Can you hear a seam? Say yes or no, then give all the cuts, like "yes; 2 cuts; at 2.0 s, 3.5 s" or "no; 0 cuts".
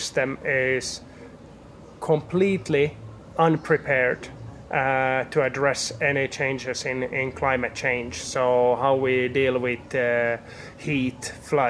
no; 0 cuts